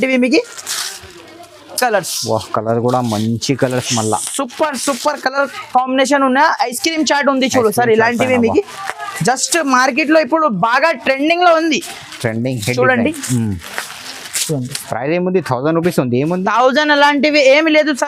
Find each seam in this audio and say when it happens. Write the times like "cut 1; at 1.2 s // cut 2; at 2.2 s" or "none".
none

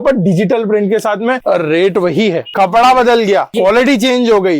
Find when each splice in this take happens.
cut 1; at 1.4 s // cut 2; at 2.4 s // cut 3; at 3.5 s

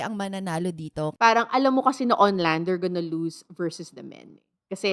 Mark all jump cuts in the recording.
cut 1; at 1.1 s

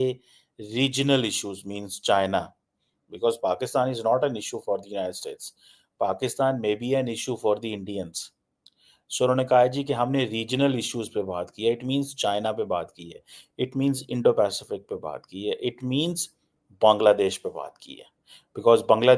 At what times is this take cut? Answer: none

